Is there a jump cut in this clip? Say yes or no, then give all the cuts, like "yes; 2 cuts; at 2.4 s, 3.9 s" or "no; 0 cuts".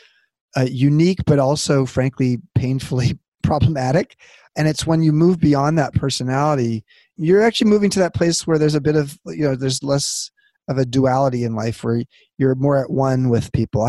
no; 0 cuts